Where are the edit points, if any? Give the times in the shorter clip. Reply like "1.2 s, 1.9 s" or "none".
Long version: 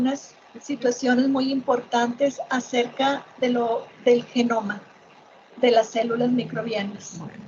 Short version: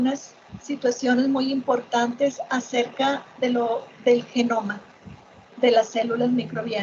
none